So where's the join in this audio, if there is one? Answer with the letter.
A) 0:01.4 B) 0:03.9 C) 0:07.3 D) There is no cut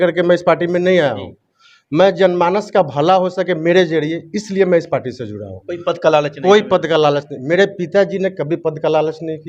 D